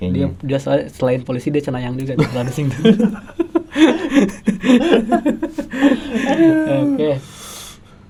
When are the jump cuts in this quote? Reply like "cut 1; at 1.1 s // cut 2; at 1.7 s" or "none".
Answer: none